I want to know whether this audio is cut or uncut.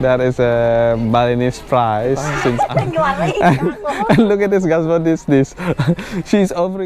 cut